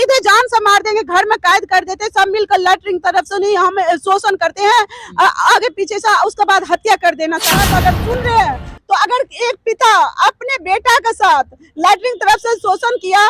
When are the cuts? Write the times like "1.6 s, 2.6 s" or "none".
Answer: 7.5 s